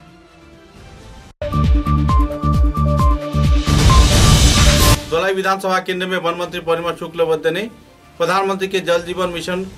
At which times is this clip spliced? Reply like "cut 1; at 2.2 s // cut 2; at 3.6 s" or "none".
cut 1; at 1.3 s // cut 2; at 5.0 s